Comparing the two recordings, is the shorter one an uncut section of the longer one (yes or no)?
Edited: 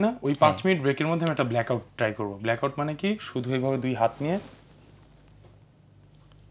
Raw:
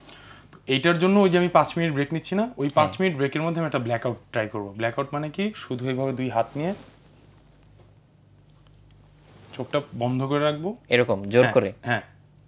yes